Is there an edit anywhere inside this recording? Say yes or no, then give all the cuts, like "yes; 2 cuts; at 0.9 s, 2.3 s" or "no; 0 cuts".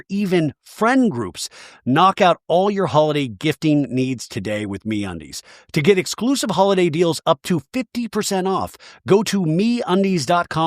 yes; 1 cut; at 1.7 s